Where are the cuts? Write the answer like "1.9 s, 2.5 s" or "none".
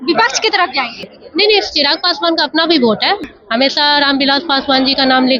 1.0 s, 3.2 s